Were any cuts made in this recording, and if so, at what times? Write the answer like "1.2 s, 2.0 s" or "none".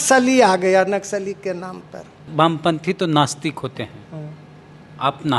2.3 s